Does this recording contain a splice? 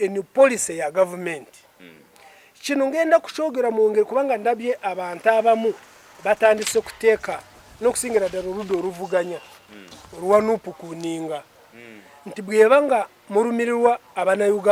no; 0 cuts

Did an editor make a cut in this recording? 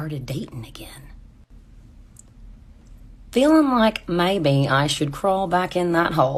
no; 0 cuts

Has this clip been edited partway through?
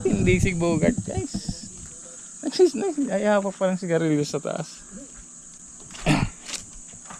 no; 0 cuts

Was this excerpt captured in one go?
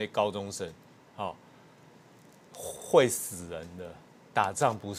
yes; 0 cuts

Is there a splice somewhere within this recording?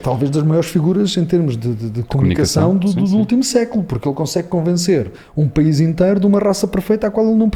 no; 0 cuts

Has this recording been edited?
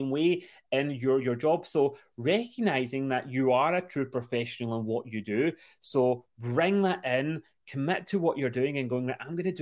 no; 0 cuts

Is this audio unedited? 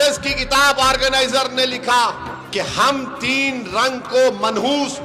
no; 1 cut; at 2.3 s

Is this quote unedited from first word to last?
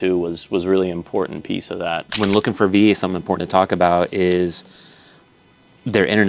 no; 1 cut; at 2.1 s

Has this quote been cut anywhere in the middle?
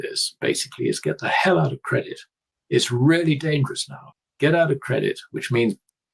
no; 0 cuts

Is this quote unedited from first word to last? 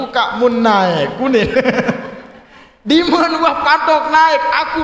yes; 0 cuts

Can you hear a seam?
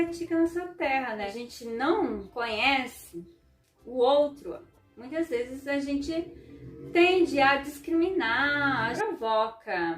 yes; 2 cuts; at 1.3 s, 8.9 s

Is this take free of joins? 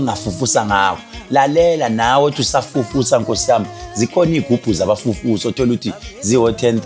no; 1 cut; at 4.4 s

